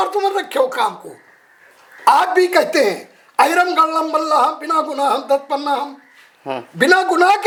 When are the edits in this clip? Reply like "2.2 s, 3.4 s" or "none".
none